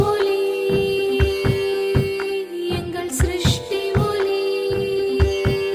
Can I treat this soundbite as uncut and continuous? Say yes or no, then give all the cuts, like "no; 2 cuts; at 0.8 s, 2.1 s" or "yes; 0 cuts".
yes; 0 cuts